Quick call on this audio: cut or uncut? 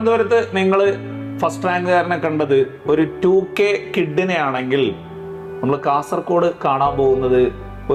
uncut